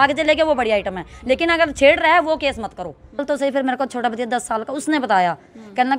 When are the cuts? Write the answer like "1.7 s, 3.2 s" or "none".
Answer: 3.2 s